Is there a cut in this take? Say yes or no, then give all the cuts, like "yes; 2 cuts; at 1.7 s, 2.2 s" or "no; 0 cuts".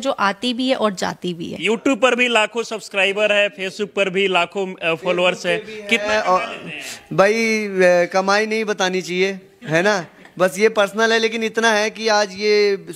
yes; 1 cut; at 1.6 s